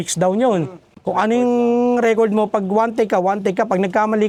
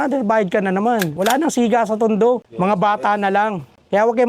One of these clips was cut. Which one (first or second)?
second